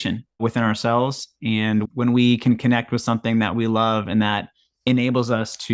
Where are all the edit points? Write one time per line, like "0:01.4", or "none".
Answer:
0:01.8